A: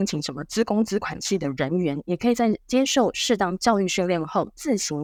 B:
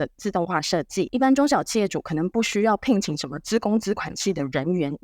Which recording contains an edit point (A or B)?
B